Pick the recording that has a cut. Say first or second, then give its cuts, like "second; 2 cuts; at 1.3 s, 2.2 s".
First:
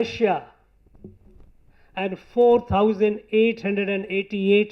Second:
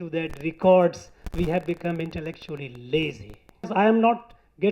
second; 1 cut; at 3.7 s